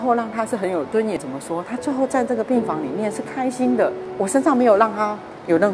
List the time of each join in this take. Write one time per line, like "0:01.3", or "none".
0:01.2
0:04.0